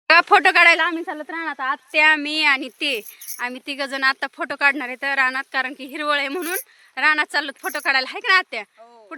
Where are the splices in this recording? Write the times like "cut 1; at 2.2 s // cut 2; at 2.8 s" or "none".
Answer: none